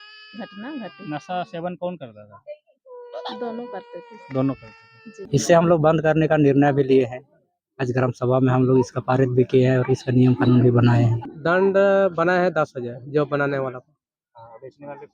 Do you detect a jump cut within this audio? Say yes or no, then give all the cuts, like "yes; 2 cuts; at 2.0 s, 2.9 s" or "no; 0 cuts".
yes; 2 cuts; at 5.3 s, 11.3 s